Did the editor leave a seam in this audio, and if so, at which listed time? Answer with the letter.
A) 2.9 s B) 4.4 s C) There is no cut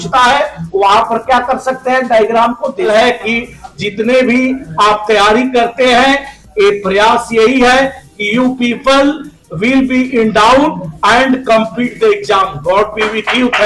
A